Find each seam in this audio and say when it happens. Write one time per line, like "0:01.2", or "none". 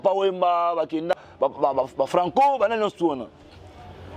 0:01.1